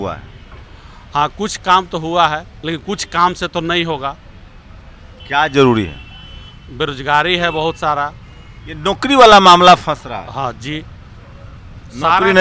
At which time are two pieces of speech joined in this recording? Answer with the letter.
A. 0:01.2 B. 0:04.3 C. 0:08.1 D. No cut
D